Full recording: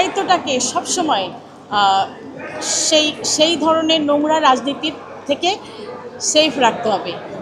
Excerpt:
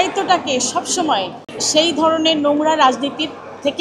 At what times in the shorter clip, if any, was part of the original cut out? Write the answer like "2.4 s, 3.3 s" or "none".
1.6 s